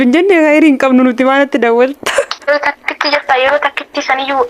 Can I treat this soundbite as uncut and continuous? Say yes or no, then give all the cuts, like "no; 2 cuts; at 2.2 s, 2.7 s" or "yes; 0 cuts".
no; 1 cut; at 2.5 s